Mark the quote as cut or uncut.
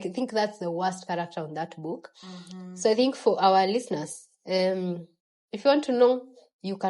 uncut